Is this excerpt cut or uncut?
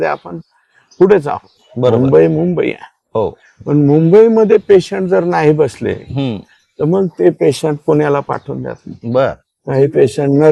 uncut